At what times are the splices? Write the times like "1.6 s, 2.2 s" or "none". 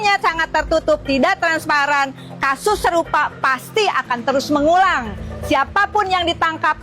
none